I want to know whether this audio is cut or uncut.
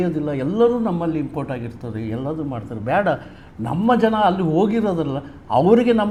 uncut